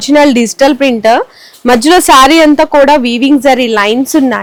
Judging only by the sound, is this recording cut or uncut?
uncut